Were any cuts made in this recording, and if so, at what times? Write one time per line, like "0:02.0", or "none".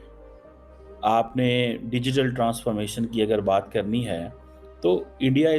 0:01.0